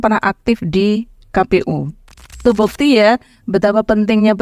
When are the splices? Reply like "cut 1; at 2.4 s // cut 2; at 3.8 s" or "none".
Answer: cut 1; at 2.4 s